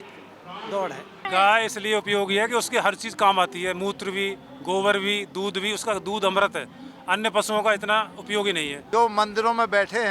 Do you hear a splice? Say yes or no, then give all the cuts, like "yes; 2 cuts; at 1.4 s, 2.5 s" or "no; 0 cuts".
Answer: yes; 2 cuts; at 1.3 s, 8.7 s